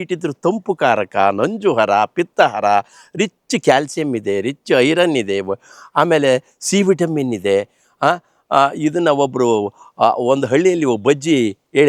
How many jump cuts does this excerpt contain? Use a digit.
0